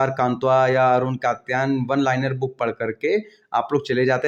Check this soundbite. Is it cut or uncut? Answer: uncut